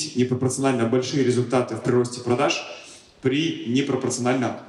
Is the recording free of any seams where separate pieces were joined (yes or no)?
yes